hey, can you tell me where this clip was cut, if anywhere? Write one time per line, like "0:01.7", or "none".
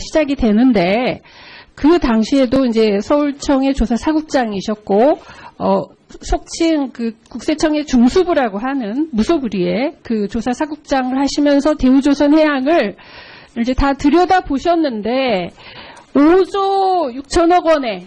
none